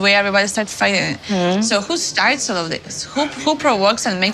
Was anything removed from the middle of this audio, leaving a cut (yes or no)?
no